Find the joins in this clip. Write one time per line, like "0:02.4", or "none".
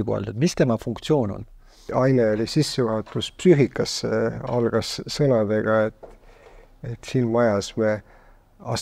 0:01.9